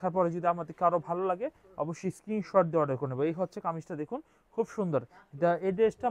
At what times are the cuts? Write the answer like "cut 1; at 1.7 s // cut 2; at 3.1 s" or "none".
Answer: none